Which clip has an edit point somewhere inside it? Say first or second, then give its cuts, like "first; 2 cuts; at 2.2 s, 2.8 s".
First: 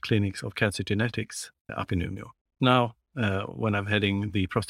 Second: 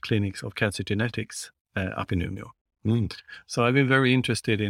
first; 2 cuts; at 1.7 s, 2.6 s